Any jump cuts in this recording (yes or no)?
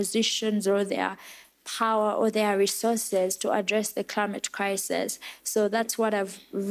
no